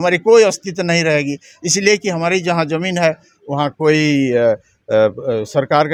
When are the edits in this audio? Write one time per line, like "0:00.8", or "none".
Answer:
none

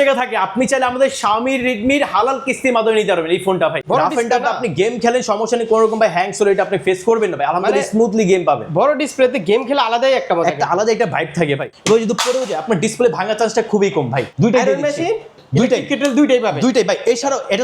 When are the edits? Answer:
0:03.8
0:11.7
0:14.3
0:15.4

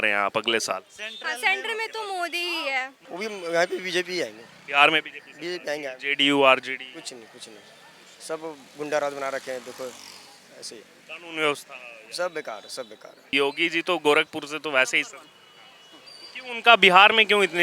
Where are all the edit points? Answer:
0:03.0
0:13.3

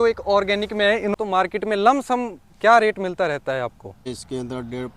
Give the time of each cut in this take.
0:01.1
0:04.1

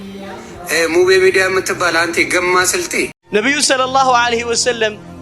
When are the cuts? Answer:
0:03.2

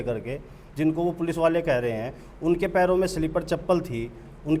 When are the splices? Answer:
none

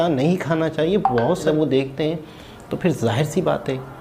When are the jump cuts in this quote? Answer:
0:01.5

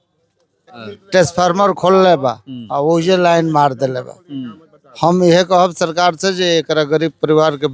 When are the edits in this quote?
0:00.9

